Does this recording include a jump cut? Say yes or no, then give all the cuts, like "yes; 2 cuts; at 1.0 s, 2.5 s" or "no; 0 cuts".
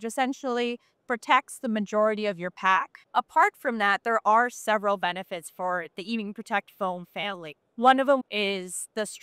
yes; 2 cuts; at 3.0 s, 8.2 s